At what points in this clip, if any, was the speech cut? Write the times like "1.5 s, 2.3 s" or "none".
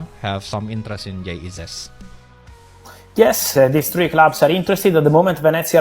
3.5 s

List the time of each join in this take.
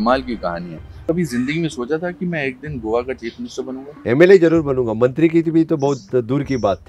1.0 s, 3.9 s

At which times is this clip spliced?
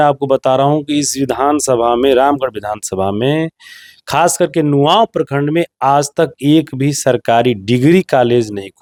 none

